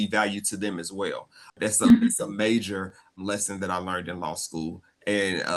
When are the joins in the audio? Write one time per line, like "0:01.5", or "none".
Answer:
0:01.5
0:03.2

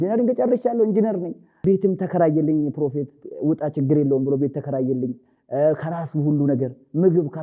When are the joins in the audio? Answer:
0:01.5

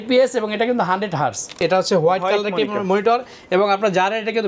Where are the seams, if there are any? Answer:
0:01.6

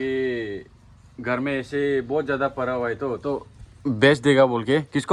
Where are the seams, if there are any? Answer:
none

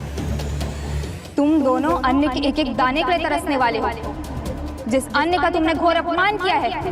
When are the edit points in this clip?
none

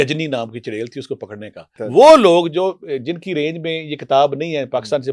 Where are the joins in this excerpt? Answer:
0:01.7

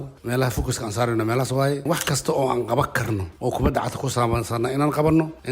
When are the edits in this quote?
0:01.8

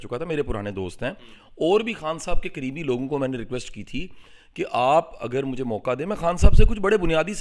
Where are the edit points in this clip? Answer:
none

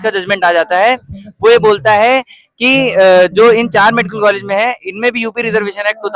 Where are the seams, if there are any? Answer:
none

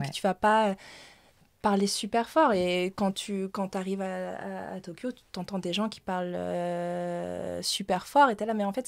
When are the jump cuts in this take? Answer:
none

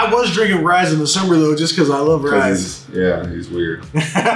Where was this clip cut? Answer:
none

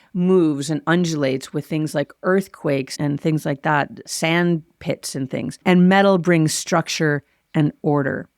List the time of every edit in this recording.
0:02.9
0:04.0
0:05.6

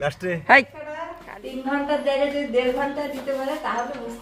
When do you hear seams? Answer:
0:01.1

